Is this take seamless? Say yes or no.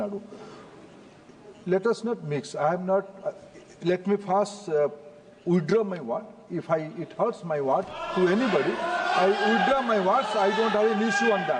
yes